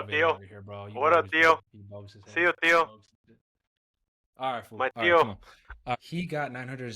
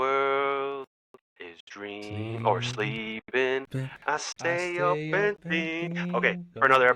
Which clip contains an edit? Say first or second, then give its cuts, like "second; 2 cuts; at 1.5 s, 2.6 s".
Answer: first; 1 cut; at 6.0 s